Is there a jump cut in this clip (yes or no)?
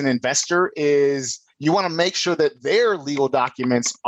no